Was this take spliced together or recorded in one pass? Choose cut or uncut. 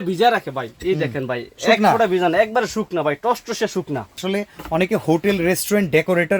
cut